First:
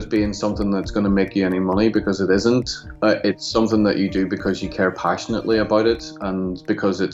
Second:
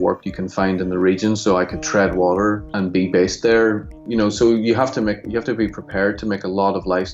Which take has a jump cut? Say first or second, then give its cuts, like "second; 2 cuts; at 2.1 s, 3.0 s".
second; 2 cuts; at 2.7 s, 3.9 s